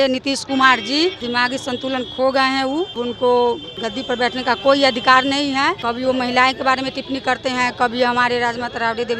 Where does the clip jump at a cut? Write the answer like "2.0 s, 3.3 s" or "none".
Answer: 1.3 s, 3.0 s, 3.8 s, 5.8 s